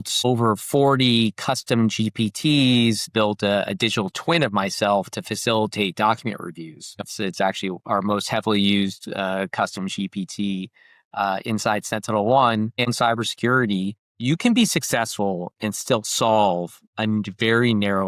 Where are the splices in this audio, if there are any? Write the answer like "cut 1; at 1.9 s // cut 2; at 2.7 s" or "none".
cut 1; at 3.1 s // cut 2; at 7.0 s // cut 3; at 12.9 s // cut 4; at 14.0 s